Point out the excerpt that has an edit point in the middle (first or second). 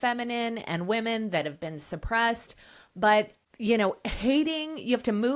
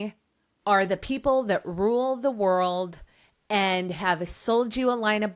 first